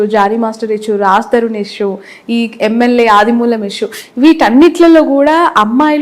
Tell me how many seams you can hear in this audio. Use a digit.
0